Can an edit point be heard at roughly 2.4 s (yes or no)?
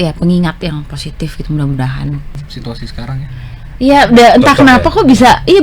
yes